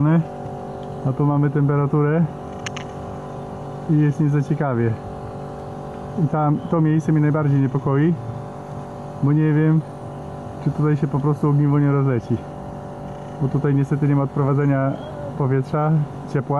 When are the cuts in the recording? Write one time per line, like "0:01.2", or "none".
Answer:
none